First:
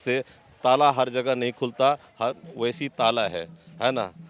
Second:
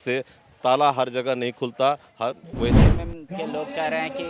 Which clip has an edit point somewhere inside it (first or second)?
second